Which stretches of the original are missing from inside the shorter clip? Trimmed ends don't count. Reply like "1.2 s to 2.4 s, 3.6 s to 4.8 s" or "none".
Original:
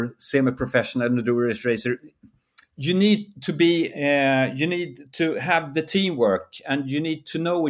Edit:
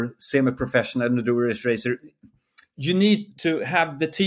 3.3 s to 5.1 s